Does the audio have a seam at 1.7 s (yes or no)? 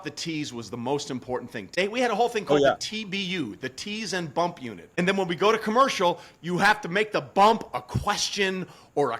yes